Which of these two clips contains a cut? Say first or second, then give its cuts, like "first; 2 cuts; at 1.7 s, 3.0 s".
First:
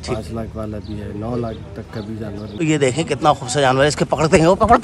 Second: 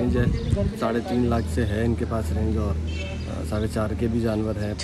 first; 1 cut; at 2.5 s